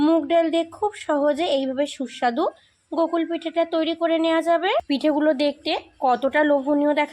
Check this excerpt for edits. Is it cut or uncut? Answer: cut